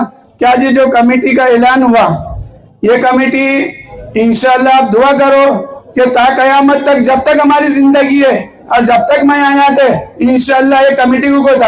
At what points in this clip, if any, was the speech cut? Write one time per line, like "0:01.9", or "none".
none